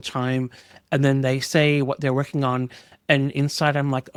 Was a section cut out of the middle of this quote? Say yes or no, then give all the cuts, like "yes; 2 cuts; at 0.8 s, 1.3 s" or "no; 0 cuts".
no; 0 cuts